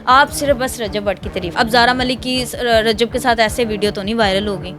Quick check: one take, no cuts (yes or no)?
no